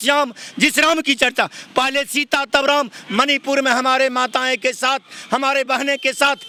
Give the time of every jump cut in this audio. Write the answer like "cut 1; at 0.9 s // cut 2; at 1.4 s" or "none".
none